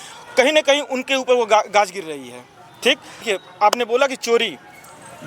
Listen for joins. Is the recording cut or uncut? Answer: cut